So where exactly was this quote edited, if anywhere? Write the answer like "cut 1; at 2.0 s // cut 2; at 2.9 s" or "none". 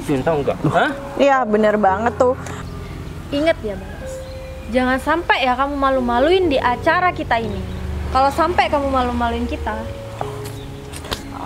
cut 1; at 2.5 s